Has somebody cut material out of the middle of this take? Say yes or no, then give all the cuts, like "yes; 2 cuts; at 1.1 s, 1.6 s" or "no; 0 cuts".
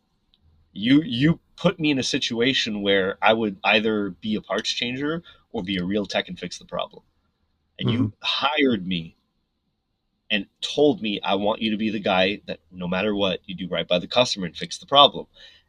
no; 0 cuts